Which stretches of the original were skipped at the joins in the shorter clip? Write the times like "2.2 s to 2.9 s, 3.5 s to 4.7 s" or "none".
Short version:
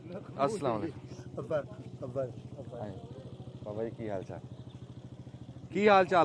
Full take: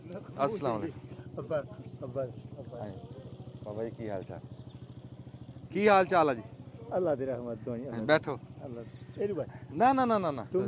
none